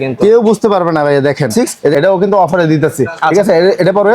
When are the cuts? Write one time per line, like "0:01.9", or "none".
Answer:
0:01.7